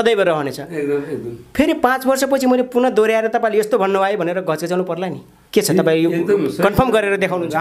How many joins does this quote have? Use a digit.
0